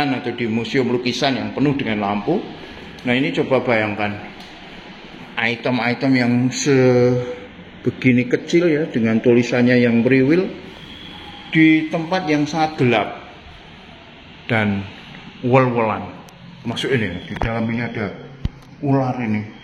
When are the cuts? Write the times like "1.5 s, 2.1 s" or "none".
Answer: none